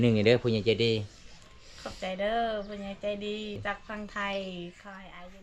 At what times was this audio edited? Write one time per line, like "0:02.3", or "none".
0:03.6

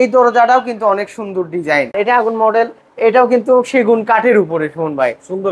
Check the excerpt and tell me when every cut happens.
0:01.9

